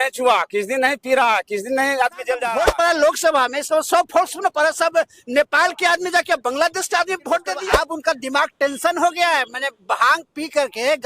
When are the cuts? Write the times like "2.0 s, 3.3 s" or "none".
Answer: 2.4 s, 7.6 s